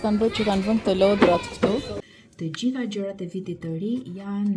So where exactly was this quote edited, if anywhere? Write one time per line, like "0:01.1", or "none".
0:02.0

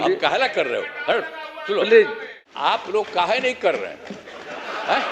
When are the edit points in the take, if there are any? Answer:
0:02.7

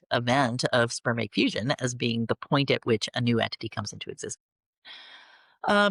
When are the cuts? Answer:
none

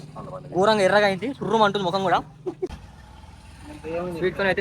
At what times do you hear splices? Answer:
0:02.8

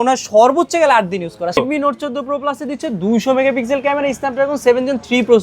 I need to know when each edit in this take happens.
0:01.6

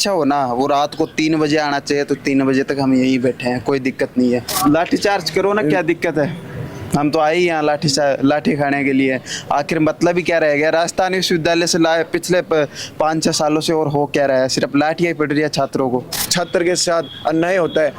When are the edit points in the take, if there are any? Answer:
0:04.5
0:16.2

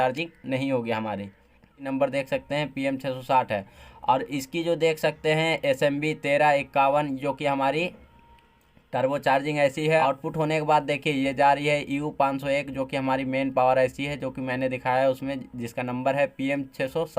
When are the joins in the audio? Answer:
0:01.8
0:10.0

